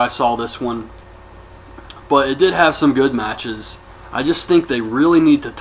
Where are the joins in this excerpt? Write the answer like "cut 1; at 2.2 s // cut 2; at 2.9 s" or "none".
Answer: none